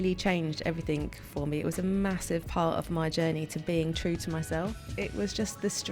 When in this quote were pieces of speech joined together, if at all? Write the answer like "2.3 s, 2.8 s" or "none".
4.9 s